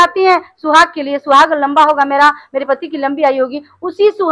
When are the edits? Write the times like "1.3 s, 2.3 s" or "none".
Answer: none